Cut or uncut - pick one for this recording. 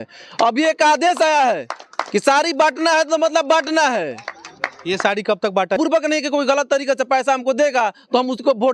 cut